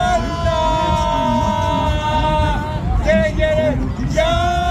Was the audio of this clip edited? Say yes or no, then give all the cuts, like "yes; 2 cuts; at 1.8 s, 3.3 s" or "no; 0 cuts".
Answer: no; 0 cuts